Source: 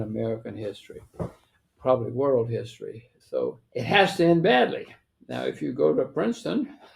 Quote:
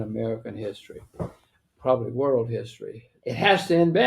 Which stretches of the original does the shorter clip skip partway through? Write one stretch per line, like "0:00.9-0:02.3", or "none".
0:03.2-0:03.6